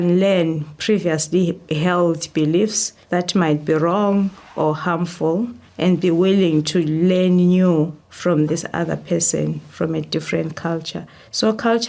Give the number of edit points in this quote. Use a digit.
0